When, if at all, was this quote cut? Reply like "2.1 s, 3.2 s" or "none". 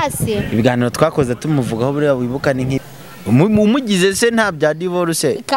2.8 s

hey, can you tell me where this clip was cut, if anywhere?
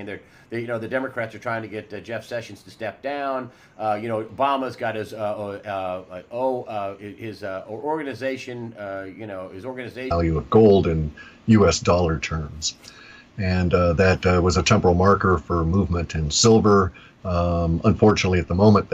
none

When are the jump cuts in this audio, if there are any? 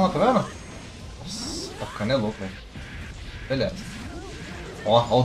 none

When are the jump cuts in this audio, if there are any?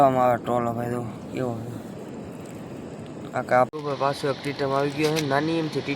3.7 s

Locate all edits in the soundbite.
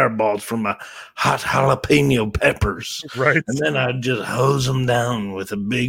none

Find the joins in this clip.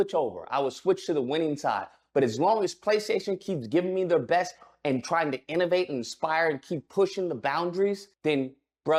none

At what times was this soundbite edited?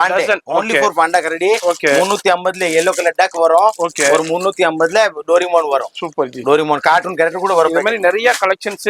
none

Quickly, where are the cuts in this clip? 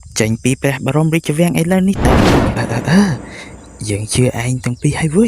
2.3 s

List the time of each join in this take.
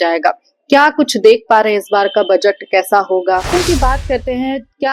3.5 s

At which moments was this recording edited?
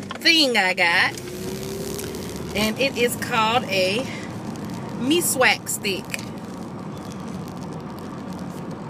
none

